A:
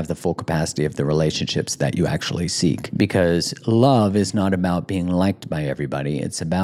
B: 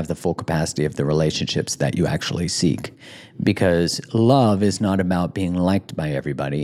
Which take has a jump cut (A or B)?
A